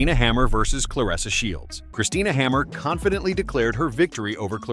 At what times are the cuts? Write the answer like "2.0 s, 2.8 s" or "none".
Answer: 1.8 s